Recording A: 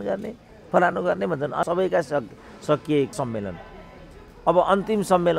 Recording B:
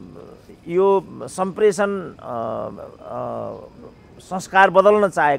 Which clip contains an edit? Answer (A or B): A